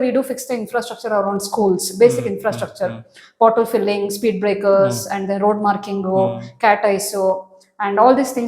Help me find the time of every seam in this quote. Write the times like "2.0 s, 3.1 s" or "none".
none

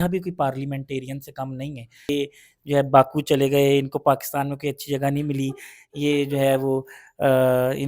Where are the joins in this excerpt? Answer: 2.1 s

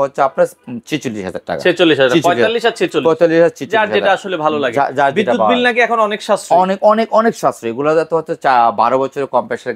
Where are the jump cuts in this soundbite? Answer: none

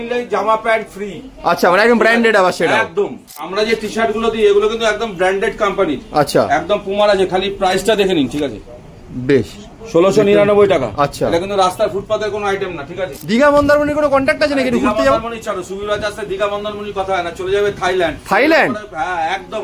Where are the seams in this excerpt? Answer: 3.4 s, 13.1 s

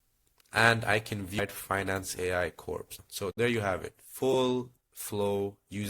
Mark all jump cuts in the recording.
1.4 s, 3.0 s

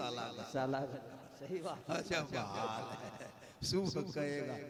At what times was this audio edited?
none

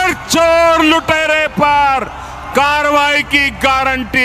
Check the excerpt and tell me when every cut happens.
none

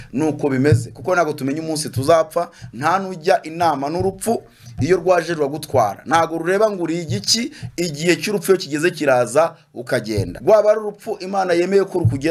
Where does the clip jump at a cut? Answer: 10.3 s

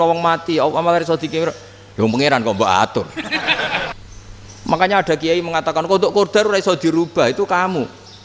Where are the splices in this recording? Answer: 3.9 s

